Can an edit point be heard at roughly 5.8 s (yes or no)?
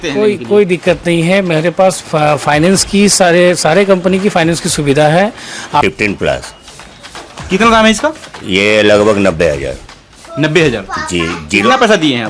yes